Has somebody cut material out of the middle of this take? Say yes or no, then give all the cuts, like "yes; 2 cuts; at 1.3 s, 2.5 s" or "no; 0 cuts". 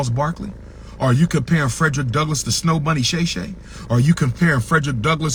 no; 0 cuts